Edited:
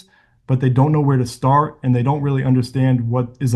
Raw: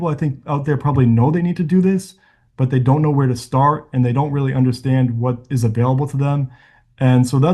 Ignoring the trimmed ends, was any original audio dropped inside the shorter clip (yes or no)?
no